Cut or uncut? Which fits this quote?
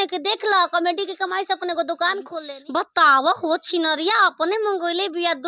cut